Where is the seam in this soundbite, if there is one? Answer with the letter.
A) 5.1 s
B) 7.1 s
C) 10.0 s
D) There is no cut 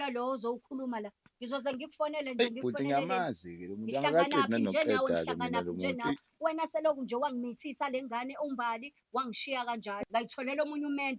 C